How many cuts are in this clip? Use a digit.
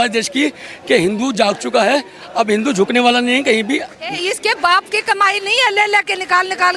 1